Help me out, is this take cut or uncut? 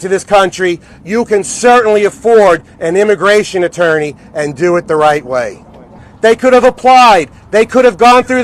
cut